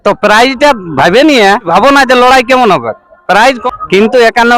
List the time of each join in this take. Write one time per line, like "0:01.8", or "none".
0:01.7
0:03.6